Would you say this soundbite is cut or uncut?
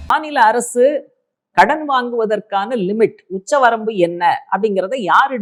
uncut